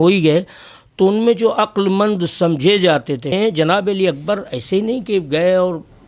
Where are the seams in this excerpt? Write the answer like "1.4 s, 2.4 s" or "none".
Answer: 3.3 s